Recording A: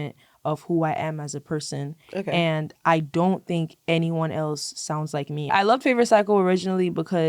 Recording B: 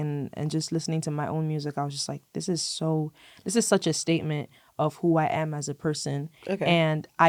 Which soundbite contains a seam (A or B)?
A